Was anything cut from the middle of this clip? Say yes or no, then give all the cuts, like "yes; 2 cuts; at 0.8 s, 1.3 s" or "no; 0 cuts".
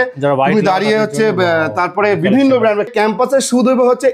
yes; 1 cut; at 2.9 s